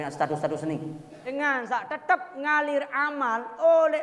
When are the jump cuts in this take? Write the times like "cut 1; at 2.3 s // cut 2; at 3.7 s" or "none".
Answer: cut 1; at 1.2 s

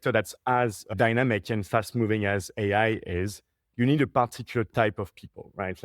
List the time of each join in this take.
cut 1; at 0.9 s

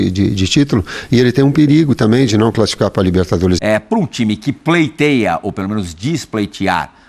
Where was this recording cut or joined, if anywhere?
cut 1; at 3.6 s

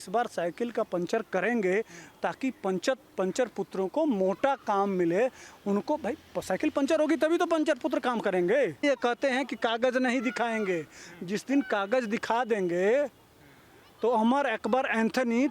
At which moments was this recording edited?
cut 1; at 8.8 s

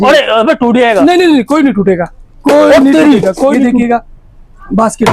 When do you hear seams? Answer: cut 1; at 3.7 s

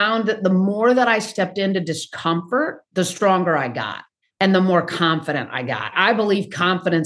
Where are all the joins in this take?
cut 1; at 2.8 s

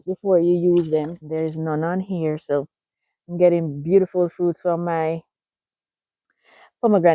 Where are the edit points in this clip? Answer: cut 1; at 1.2 s

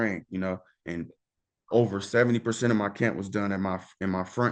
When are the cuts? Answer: none

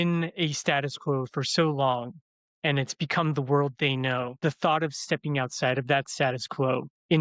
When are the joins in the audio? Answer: cut 1; at 4.4 s

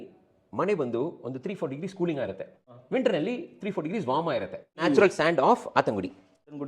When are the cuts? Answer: cut 1; at 4.8 s

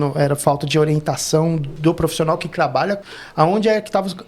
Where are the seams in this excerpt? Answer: cut 1; at 3.1 s

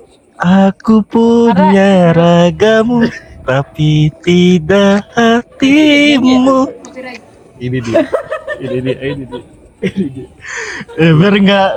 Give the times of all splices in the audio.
none

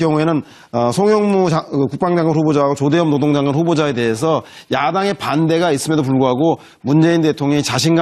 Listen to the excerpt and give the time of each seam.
cut 1; at 4.6 s

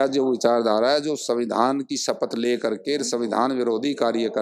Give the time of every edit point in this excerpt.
none

